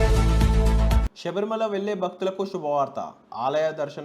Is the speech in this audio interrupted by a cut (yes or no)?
yes